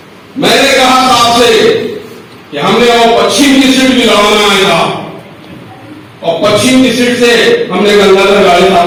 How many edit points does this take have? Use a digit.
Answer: 0